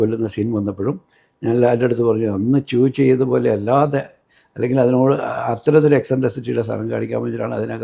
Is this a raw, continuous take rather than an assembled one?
yes; 0 cuts

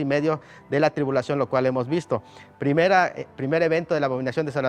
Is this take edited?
no; 0 cuts

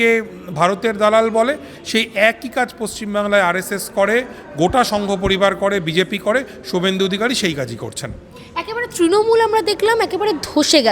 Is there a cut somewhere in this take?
no; 0 cuts

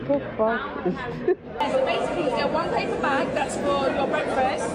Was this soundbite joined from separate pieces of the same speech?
yes; 1 cut; at 1.6 s

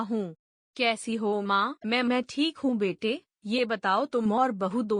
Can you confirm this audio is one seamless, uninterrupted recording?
no; 1 cut; at 1.8 s

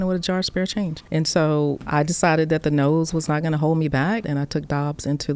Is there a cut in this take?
yes; 3 cuts; at 1.0 s, 1.8 s, 4.3 s

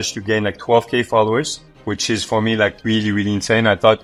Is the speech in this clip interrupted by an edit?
no; 0 cuts

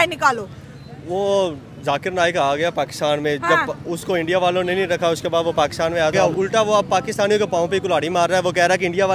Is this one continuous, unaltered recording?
no; 1 cut; at 6.1 s

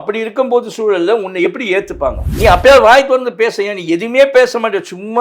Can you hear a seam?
yes; 1 cut; at 2.3 s

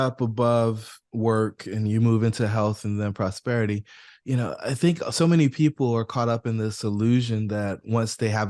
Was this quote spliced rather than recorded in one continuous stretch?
no; 0 cuts

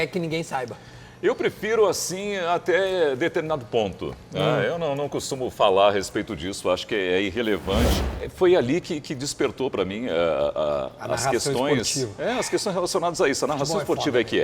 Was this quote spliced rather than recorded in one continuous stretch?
yes; 1 cut; at 8.0 s

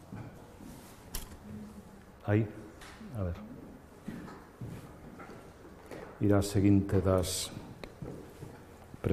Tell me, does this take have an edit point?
no; 0 cuts

